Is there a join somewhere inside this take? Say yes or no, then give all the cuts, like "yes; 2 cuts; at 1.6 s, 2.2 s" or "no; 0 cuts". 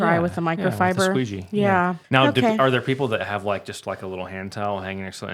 yes; 1 cut; at 2.0 s